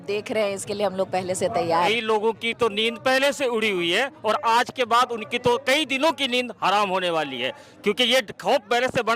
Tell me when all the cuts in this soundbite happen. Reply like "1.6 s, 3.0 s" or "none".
1.9 s